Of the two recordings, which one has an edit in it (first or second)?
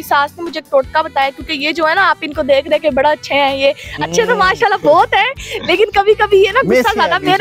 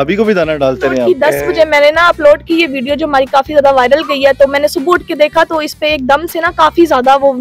second